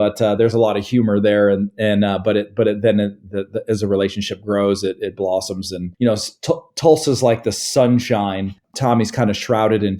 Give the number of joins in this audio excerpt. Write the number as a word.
one